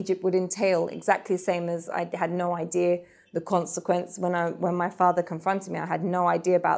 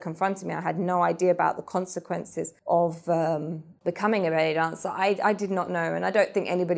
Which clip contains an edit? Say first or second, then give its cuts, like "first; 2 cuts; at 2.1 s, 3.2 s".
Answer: second; 2 cuts; at 2.5 s, 3.7 s